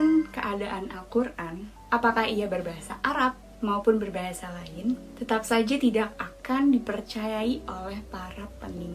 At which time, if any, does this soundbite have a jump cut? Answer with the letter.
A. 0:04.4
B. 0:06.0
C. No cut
C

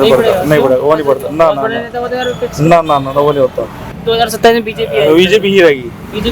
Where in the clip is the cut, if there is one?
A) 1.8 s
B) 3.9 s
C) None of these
B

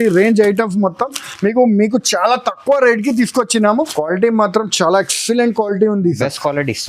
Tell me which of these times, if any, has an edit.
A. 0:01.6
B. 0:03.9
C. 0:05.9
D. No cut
B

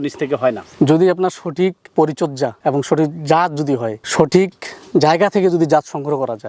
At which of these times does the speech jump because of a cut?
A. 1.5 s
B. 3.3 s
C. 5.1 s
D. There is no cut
D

